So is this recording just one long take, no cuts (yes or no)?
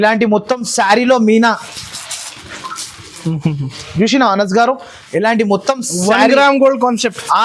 yes